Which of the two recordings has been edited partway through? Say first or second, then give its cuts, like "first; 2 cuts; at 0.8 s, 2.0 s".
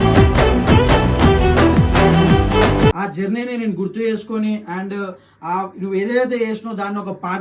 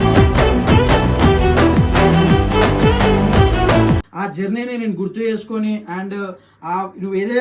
first; 1 cut; at 2.9 s